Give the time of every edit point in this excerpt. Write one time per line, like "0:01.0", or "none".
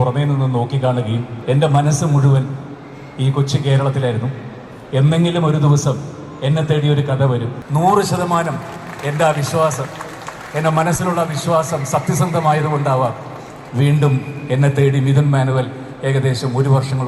0:01.3
0:07.6

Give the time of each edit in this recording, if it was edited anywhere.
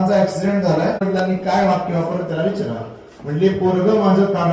0:01.0

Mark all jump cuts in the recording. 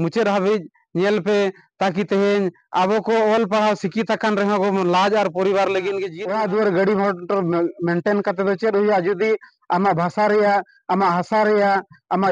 0:06.1

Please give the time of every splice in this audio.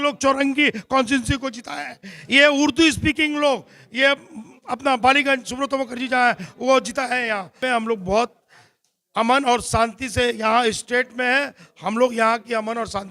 0:07.6

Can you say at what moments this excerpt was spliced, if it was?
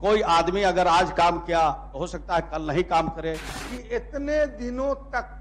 0:03.5

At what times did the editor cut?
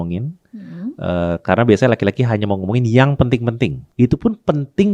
0:03.8

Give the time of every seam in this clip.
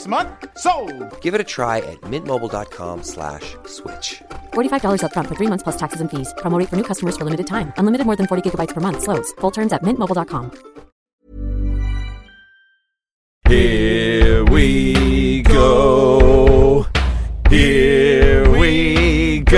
0:13.3

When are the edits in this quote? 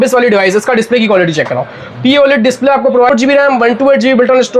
0:03.1

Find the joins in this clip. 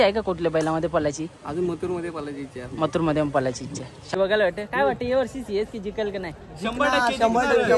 0:04.1

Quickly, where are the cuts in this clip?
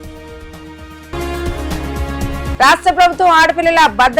0:01.0
0:02.5

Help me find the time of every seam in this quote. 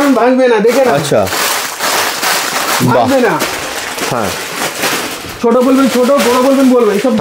none

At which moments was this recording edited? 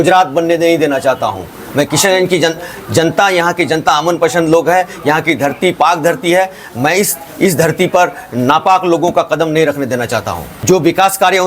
0:10.5

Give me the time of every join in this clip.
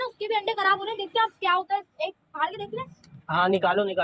none

